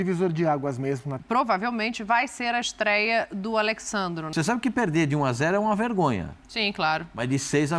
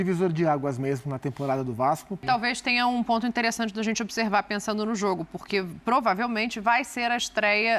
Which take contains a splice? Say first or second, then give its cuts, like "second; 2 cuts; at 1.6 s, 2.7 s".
first; 2 cuts; at 1.2 s, 4.3 s